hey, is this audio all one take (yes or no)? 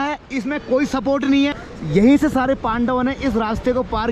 yes